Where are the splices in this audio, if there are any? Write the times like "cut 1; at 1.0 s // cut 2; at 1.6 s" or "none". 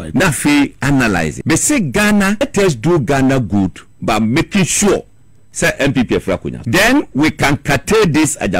cut 1; at 1.4 s // cut 2; at 2.4 s // cut 3; at 6.5 s

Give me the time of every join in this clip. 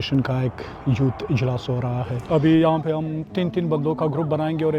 cut 1; at 2.1 s // cut 2; at 3.3 s

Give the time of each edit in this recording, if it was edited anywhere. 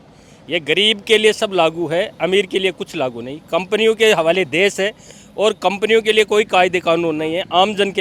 none

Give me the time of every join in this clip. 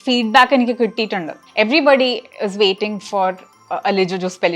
cut 1; at 1.4 s

